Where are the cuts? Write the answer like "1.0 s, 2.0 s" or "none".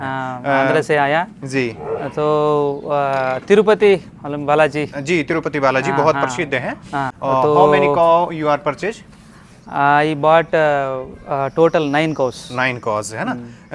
7.1 s